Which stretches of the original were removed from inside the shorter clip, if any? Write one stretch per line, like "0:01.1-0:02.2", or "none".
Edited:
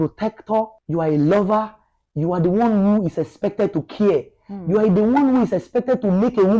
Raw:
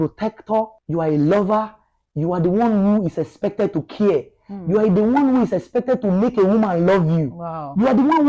none